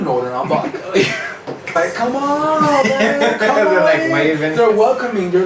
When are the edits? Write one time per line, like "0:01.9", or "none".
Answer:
0:01.8